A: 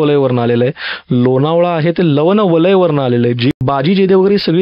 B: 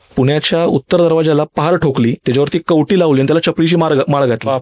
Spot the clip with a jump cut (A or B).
A